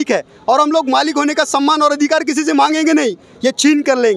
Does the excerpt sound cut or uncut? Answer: uncut